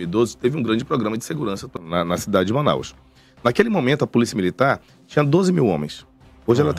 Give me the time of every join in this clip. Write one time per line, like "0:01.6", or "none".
0:01.7

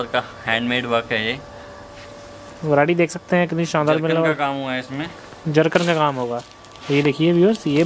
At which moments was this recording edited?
none

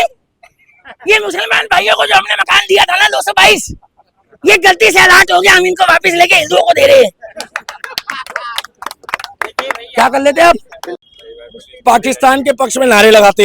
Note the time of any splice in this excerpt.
0:11.2

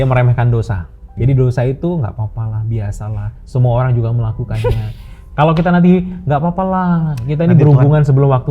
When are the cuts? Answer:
0:01.1

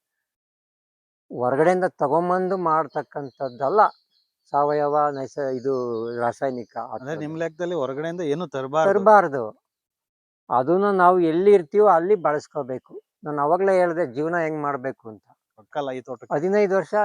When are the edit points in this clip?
0:15.7

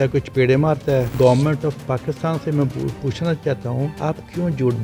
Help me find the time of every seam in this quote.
0:01.1
0:03.9

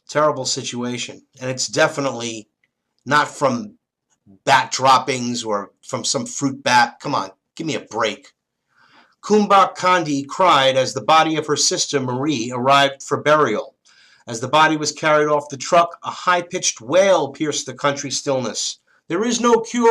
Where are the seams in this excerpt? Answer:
0:09.7

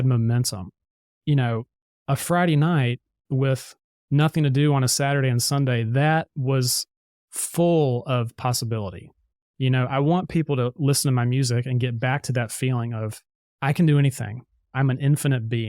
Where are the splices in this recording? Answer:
0:14.7

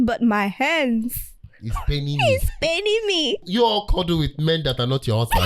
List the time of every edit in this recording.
0:03.4

